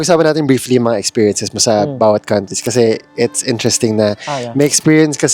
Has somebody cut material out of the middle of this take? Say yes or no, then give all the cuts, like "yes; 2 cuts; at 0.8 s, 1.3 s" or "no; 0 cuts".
no; 0 cuts